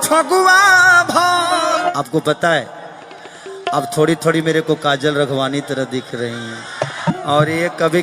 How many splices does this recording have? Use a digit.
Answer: 2